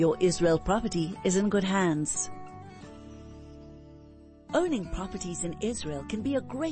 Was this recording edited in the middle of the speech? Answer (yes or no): yes